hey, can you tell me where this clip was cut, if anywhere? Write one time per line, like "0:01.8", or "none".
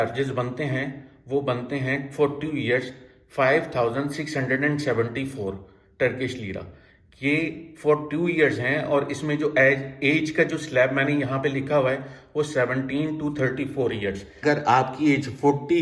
0:14.4